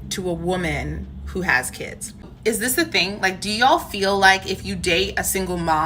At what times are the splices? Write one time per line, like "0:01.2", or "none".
none